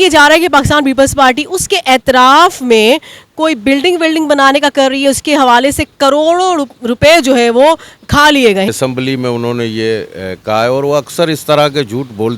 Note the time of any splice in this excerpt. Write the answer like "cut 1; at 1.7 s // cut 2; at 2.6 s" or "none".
cut 1; at 8.7 s